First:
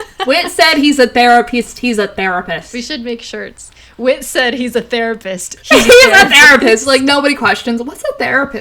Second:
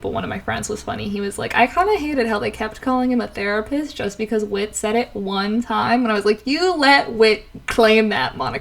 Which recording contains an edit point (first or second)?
first